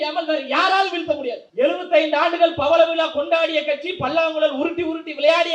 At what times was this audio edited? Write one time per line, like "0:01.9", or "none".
0:01.4